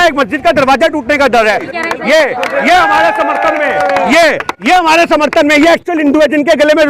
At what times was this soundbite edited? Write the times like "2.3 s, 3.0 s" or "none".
1.7 s